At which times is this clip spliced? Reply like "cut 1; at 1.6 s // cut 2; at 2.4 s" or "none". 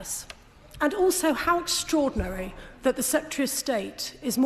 none

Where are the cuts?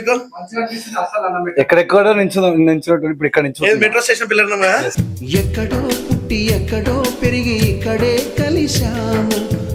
none

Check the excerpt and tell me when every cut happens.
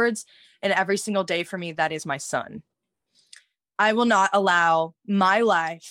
none

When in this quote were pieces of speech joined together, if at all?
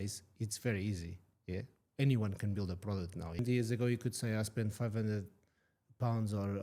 cut 1; at 3.4 s

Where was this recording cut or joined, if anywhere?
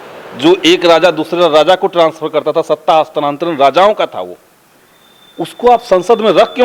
none

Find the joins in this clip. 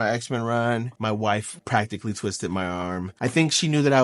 cut 1; at 1.5 s // cut 2; at 3.1 s

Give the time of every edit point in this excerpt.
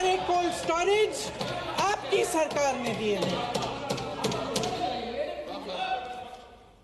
none

